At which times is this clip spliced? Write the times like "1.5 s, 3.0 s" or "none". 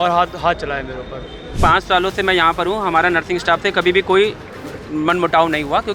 1.5 s